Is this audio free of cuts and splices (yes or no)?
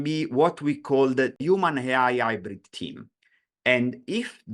no